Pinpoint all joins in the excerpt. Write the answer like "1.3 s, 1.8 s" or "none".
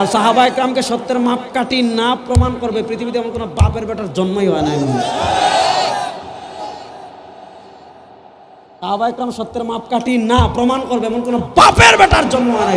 none